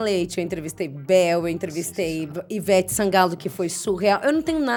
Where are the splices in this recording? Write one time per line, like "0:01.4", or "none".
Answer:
none